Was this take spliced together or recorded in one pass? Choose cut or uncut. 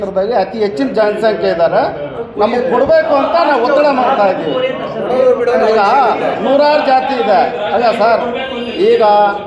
uncut